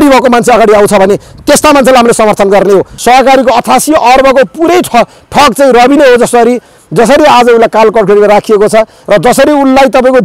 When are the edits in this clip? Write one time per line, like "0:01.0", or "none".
0:02.9